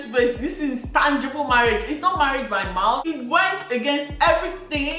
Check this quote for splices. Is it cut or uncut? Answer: cut